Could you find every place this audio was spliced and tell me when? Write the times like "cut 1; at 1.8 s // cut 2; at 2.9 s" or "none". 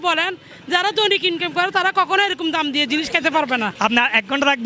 cut 1; at 3.7 s